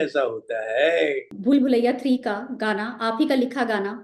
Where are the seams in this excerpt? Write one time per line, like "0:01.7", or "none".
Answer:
0:01.3